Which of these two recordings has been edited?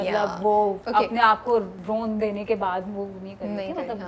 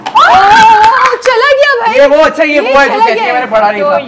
first; 2 cuts; at 0.8 s, 1.8 s

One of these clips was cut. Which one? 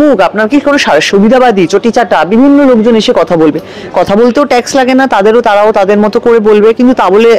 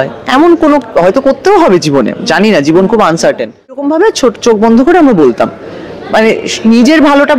second; 1 cut; at 3.8 s

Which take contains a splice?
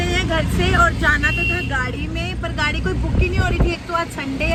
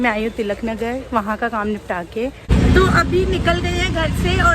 second; 1 cut; at 2.5 s

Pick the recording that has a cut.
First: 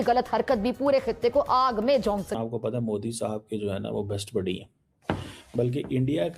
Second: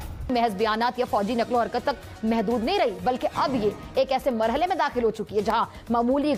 first; 1 cut; at 2.3 s

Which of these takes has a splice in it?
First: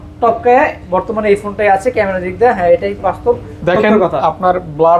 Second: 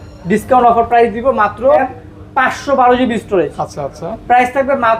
second; 1 cut; at 1.9 s

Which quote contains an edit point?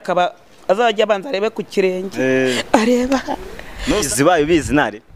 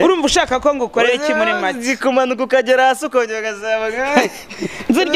first; 1 cut; at 4.1 s

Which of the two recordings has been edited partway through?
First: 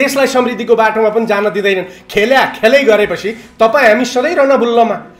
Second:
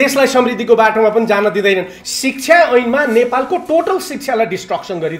second; 1 cut; at 2.0 s

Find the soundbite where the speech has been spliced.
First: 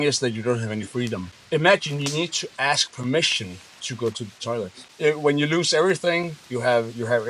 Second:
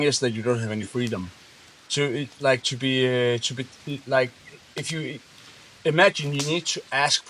first; 2 cuts; at 1.3 s, 4.8 s

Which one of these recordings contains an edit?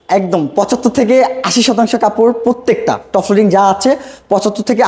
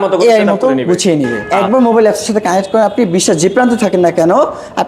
second; 1 cut; at 1.4 s

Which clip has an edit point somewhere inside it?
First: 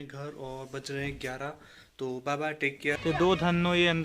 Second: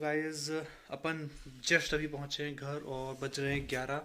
first; 1 cut; at 3.0 s

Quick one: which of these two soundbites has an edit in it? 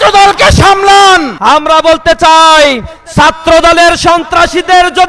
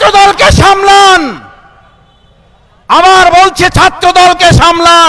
first; 1 cut; at 1.3 s

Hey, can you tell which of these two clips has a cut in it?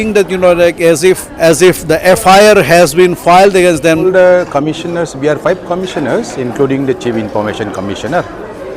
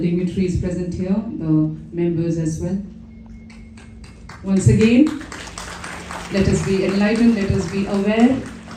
first; 2 cuts; at 1.3 s, 4.0 s

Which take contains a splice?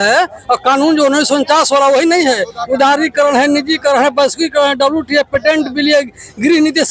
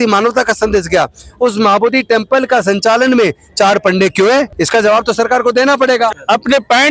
second; 2 cuts; at 4.6 s, 6.1 s

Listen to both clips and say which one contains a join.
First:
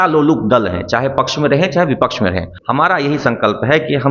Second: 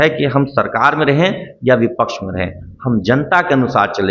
first; 1 cut; at 2.5 s

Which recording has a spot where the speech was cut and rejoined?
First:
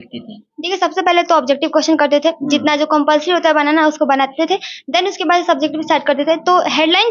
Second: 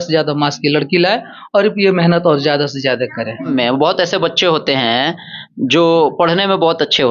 second; 1 cut; at 3.5 s

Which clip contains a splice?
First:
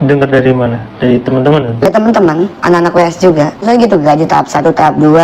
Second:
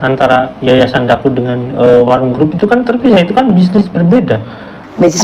first; 2 cuts; at 2.6 s, 3.6 s

